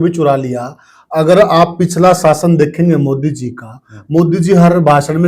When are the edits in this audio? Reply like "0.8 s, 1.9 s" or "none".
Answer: none